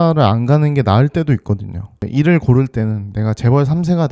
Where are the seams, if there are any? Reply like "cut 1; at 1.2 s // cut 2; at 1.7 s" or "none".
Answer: cut 1; at 2.1 s